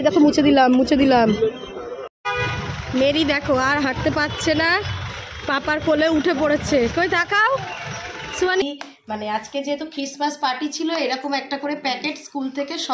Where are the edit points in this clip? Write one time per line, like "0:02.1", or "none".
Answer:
0:02.2
0:08.6